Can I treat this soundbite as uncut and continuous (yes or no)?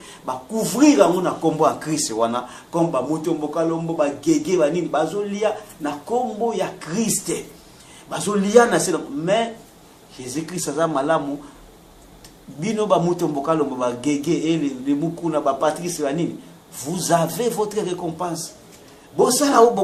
yes